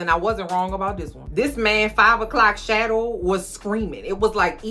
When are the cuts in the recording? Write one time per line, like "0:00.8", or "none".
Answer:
0:01.2